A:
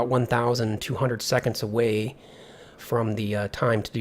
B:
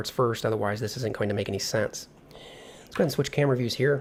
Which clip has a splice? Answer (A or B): A